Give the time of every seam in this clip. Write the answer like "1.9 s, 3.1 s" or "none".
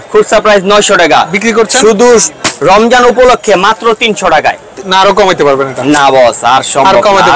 none